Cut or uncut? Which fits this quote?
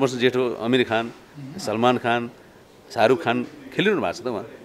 uncut